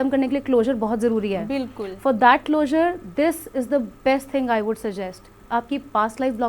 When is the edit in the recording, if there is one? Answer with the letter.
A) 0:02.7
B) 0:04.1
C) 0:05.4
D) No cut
C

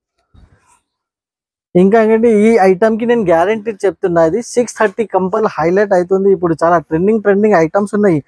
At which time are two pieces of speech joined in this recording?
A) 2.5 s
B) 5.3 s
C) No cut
B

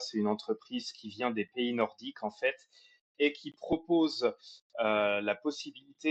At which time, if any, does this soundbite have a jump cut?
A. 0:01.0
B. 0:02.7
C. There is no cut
C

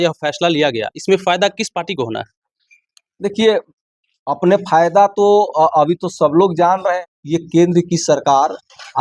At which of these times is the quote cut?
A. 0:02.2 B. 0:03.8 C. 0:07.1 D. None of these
C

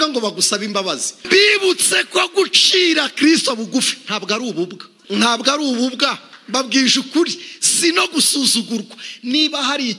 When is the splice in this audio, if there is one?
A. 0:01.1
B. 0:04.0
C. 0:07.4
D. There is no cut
A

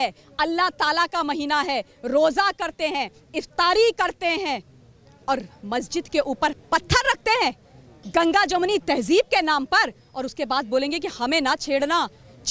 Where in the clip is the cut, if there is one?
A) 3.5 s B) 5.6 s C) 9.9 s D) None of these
D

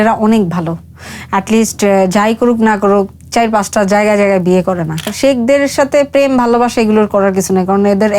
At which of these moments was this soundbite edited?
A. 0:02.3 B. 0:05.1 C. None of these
B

